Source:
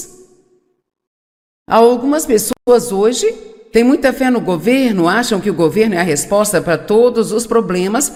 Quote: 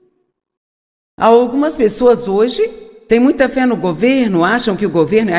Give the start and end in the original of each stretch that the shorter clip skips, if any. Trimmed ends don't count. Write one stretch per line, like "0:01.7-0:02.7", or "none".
0:02.5-0:02.6